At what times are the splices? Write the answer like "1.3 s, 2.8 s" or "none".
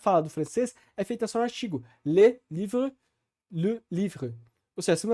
none